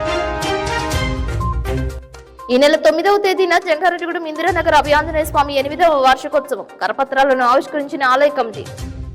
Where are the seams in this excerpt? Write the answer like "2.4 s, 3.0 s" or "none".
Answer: 1.9 s

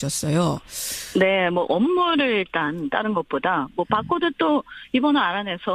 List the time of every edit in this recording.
none

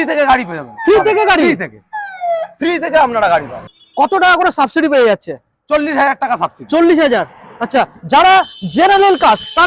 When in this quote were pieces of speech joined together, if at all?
3.7 s

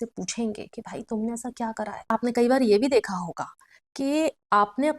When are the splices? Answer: 2.0 s

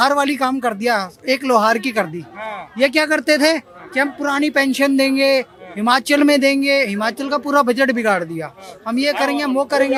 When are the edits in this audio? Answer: none

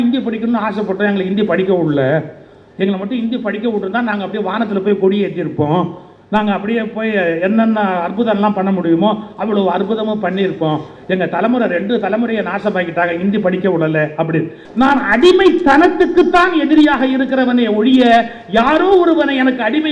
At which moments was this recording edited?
14.6 s

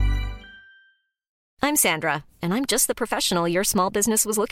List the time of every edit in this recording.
1.4 s

